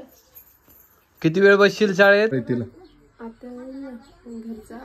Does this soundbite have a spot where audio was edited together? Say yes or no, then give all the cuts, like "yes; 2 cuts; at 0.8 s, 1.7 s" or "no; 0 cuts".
yes; 1 cut; at 2.3 s